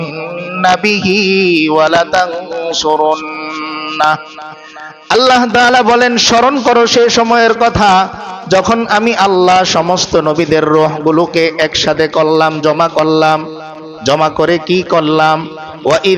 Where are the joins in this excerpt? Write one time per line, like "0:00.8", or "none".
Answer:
none